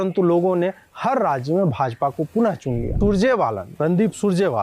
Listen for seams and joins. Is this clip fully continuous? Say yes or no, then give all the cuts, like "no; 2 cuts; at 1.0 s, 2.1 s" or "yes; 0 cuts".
no; 1 cut; at 2.9 s